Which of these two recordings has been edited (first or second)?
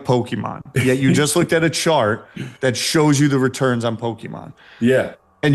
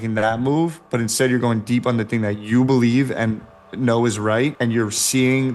second